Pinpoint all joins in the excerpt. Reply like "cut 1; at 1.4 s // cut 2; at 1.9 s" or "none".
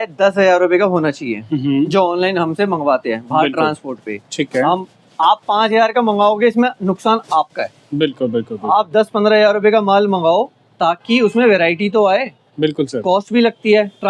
none